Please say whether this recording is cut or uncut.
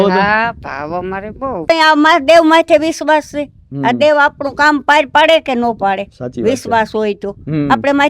cut